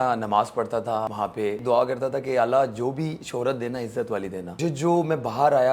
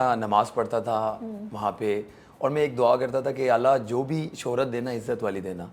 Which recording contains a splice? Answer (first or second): first